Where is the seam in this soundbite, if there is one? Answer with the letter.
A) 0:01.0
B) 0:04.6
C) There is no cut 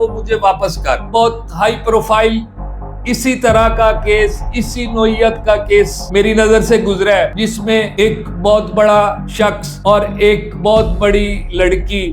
A